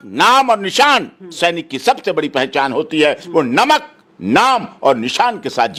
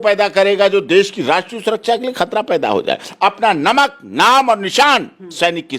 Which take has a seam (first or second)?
second